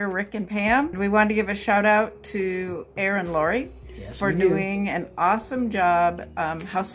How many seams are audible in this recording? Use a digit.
1